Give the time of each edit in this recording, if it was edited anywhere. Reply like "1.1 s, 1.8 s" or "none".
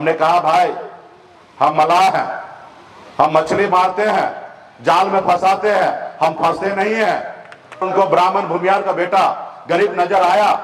7.8 s